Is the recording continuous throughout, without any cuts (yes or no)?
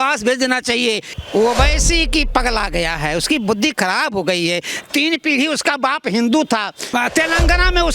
no